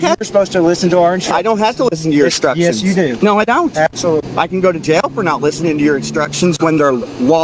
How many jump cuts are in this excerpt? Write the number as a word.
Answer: zero